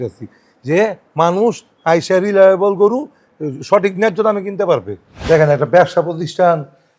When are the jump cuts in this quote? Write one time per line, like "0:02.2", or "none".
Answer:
0:05.2